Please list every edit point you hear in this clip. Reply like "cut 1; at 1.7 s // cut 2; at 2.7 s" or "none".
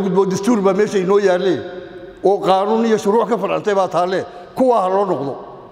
none